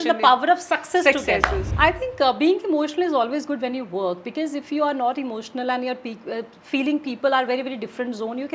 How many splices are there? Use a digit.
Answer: 1